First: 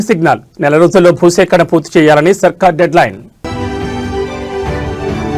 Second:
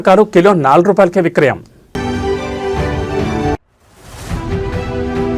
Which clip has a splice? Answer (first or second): second